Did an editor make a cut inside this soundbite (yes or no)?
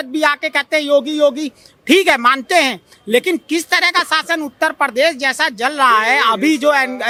no